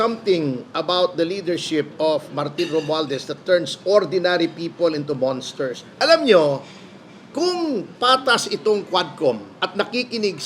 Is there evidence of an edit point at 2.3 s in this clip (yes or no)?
no